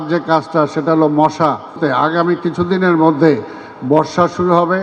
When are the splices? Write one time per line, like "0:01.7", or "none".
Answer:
0:01.8